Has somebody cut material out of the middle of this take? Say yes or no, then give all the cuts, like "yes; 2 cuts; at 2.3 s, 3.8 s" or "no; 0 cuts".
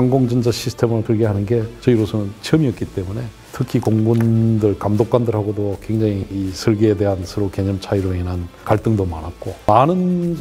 yes; 2 cuts; at 1.0 s, 9.6 s